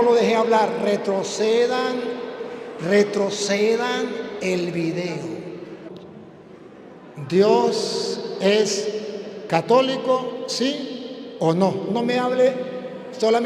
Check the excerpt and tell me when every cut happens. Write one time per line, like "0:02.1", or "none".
0:05.9